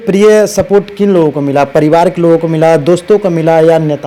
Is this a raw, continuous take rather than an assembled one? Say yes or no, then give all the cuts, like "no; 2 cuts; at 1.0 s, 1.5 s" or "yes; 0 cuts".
yes; 0 cuts